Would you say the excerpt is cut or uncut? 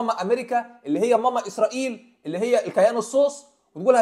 uncut